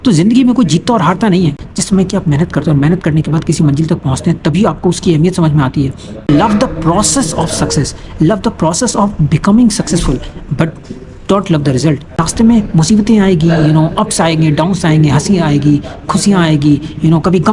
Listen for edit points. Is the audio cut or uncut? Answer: cut